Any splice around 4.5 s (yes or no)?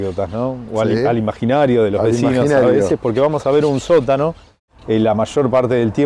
yes